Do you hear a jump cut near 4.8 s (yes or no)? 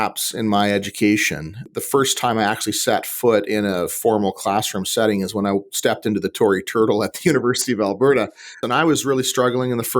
no